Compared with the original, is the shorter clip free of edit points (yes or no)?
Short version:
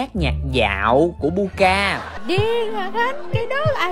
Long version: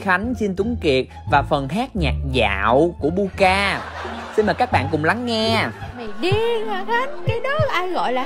no